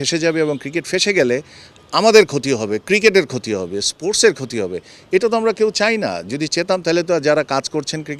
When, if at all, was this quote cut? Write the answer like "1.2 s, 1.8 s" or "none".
none